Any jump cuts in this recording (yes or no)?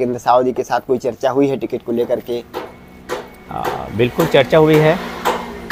no